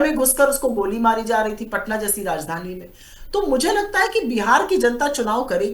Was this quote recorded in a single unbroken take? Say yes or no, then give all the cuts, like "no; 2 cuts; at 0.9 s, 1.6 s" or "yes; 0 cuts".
yes; 0 cuts